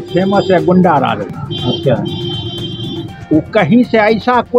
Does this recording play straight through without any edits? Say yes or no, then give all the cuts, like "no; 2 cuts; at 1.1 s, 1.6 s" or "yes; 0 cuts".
yes; 0 cuts